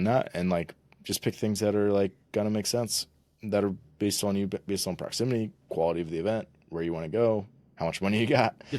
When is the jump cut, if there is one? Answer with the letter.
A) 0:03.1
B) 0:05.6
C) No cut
C